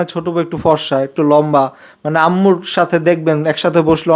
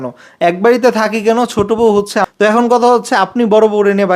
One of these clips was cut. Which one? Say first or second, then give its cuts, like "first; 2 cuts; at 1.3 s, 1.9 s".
second; 1 cut; at 2.3 s